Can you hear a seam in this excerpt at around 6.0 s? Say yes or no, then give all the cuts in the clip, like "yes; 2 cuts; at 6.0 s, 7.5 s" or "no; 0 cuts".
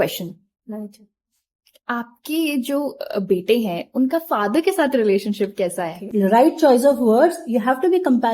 yes; 1 cut; at 6.0 s